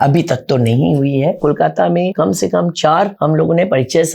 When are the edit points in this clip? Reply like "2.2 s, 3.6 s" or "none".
1.4 s, 2.1 s, 3.1 s